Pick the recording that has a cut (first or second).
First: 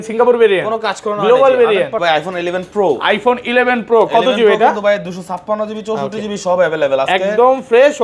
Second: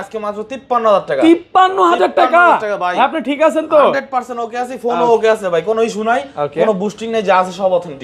first